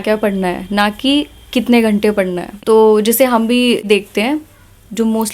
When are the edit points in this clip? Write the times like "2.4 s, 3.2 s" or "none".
2.5 s, 3.8 s

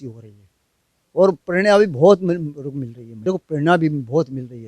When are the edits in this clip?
3.2 s

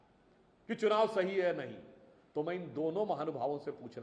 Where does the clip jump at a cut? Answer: none

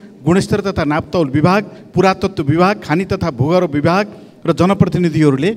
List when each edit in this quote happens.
none

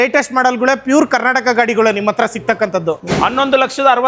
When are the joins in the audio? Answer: 3.0 s

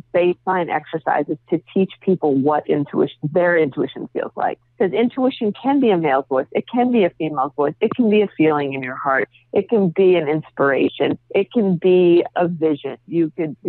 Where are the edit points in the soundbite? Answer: 4.6 s, 12.3 s

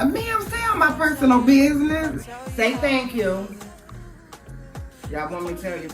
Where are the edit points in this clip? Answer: 2.1 s

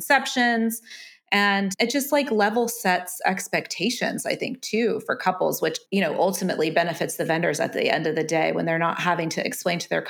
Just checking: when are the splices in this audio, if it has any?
1.7 s, 5.8 s

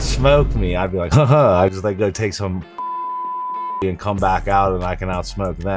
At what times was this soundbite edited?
none

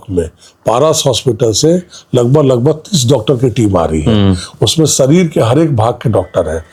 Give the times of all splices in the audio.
none

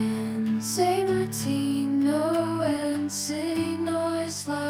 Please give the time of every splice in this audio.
none

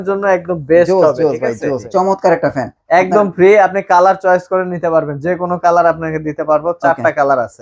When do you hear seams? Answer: 1.8 s

